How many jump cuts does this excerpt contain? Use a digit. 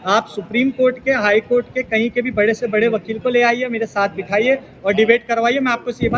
0